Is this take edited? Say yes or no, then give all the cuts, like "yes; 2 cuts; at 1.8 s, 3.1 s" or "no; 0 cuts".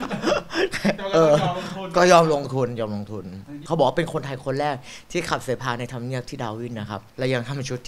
yes; 2 cuts; at 3.6 s, 7.0 s